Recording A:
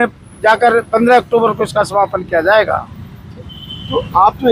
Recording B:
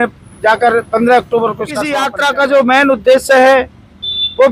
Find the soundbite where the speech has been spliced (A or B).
B